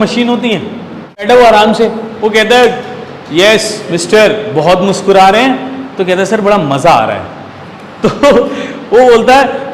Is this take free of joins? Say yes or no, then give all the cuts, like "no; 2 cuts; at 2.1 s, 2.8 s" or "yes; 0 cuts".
no; 1 cut; at 1.2 s